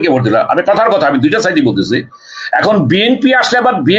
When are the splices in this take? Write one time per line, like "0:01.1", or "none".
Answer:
none